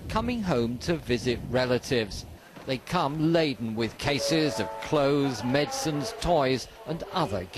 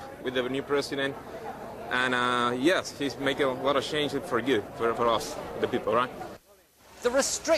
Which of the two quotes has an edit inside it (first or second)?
first